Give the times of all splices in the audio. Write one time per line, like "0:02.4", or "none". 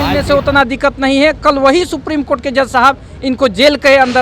none